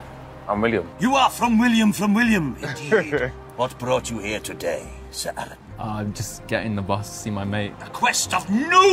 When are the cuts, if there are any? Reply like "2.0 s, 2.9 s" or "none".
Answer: 3.4 s